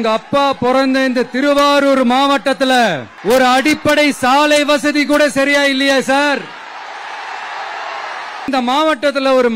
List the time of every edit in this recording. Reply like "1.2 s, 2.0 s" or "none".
3.1 s, 8.5 s